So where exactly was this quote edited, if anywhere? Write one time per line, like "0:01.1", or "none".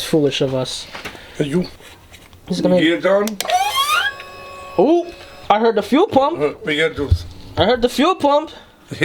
0:01.9